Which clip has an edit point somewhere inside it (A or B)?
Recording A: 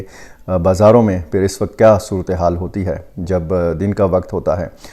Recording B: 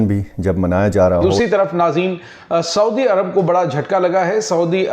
B